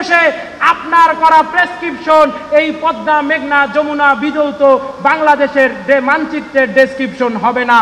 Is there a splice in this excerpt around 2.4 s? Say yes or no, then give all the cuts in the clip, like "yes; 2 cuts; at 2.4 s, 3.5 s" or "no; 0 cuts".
no; 0 cuts